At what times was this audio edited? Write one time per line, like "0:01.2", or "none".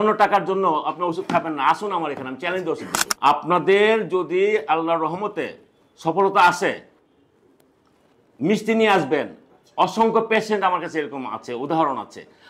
0:03.0